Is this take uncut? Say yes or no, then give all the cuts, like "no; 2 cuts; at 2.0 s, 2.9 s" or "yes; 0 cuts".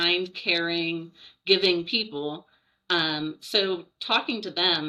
yes; 0 cuts